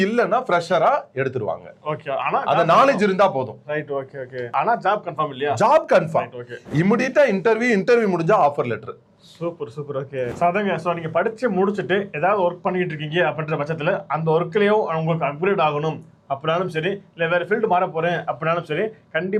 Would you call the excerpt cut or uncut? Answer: uncut